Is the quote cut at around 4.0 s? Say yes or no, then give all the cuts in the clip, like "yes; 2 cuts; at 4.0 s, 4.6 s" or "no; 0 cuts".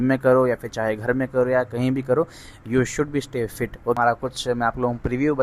yes; 1 cut; at 4.0 s